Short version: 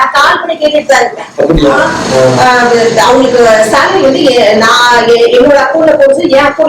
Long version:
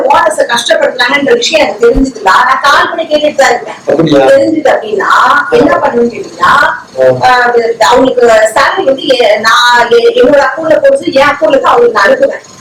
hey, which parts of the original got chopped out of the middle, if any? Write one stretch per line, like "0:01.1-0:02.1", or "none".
0:04.3-0:06.6